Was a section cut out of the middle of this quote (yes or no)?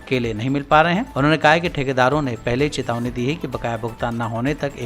no